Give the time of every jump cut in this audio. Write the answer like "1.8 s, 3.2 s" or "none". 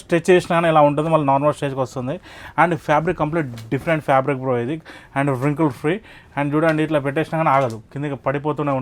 none